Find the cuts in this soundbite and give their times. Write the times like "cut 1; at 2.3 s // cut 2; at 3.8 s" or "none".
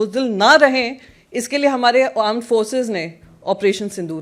none